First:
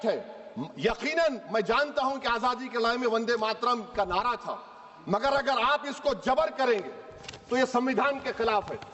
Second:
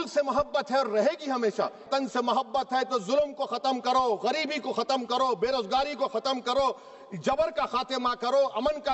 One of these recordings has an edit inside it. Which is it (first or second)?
second